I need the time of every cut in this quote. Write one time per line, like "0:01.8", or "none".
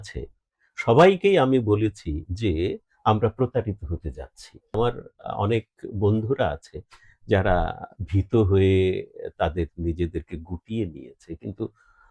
0:04.7